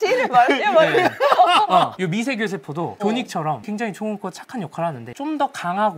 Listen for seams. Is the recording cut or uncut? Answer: uncut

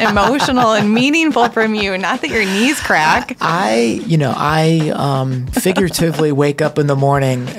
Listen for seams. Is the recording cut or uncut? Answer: cut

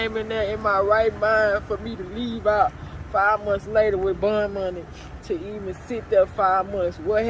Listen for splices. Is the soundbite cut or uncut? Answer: uncut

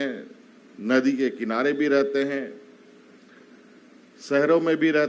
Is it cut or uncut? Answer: uncut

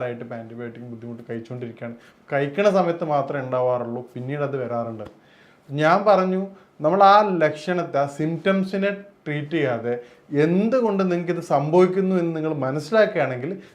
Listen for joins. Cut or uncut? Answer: uncut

